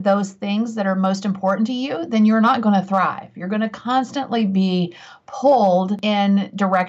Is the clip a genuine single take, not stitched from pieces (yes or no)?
yes